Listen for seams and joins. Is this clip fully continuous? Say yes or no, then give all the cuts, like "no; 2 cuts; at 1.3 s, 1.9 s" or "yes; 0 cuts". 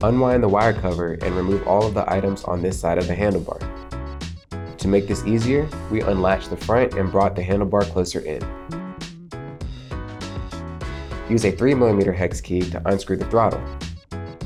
yes; 0 cuts